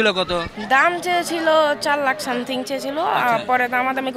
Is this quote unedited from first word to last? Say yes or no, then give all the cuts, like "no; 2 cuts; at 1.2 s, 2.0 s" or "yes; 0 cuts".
yes; 0 cuts